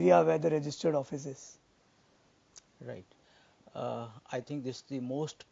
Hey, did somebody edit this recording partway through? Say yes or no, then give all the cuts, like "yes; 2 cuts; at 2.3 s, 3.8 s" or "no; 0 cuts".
yes; 1 cut; at 2.2 s